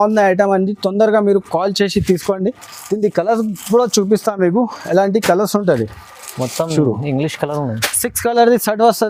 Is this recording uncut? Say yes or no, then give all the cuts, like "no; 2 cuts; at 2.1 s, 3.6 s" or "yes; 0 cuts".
yes; 0 cuts